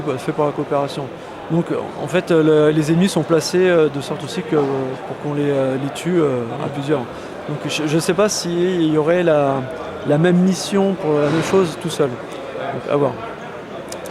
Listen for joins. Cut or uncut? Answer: uncut